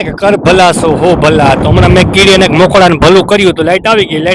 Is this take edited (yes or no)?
no